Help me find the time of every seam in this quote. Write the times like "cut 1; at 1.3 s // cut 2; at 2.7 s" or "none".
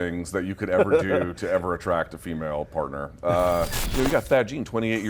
cut 1; at 3.8 s